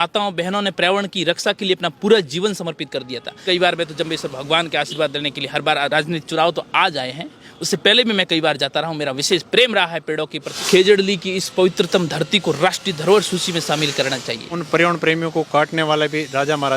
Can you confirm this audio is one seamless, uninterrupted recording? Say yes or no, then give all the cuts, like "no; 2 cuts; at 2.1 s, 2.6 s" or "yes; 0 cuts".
no; 3 cuts; at 3.4 s, 10.5 s, 14.5 s